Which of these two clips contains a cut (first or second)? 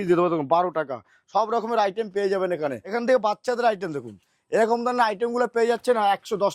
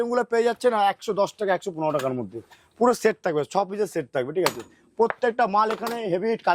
first